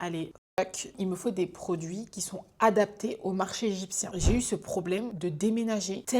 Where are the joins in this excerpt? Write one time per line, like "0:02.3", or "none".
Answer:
0:00.9
0:04.1